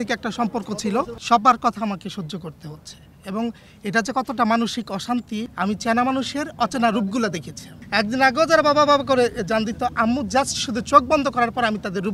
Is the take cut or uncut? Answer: cut